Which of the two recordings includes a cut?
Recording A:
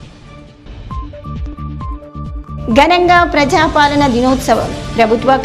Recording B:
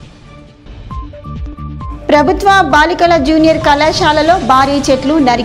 A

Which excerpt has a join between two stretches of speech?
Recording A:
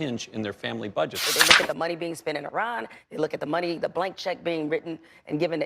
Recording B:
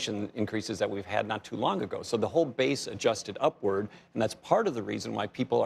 A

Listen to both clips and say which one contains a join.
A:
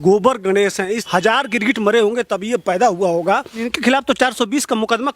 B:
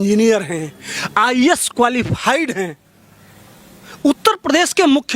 A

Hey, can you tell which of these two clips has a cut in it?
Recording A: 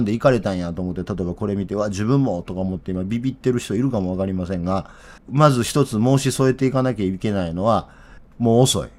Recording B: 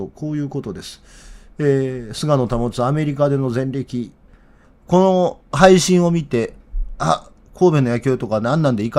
B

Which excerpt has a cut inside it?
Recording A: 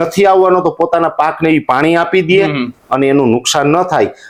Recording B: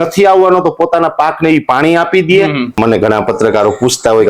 B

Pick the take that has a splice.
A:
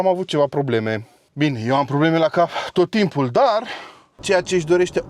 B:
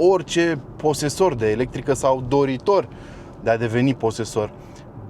A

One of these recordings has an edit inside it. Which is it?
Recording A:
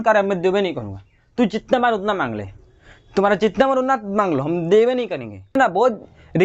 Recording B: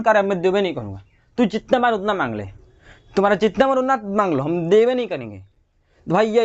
A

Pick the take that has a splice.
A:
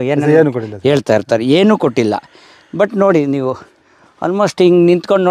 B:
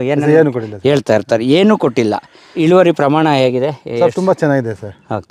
B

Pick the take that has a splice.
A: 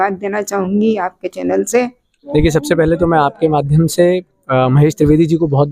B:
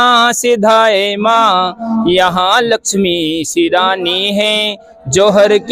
A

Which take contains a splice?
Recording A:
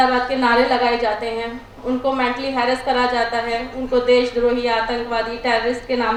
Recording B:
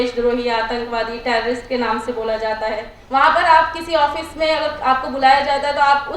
B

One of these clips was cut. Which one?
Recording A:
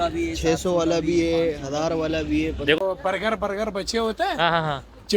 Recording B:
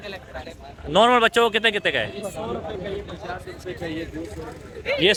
A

